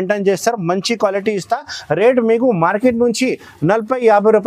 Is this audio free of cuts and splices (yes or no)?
yes